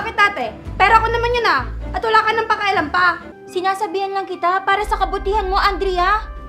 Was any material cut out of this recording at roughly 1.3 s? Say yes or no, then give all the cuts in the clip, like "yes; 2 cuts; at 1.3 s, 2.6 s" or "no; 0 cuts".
no; 1 cut; at 3.3 s